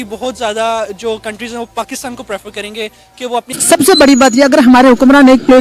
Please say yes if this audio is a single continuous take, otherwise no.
no